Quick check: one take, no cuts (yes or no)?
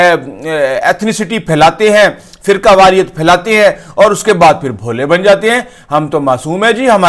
yes